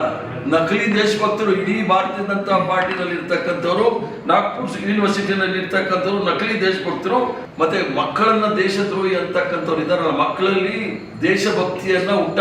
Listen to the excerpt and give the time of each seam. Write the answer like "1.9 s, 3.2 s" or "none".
7.4 s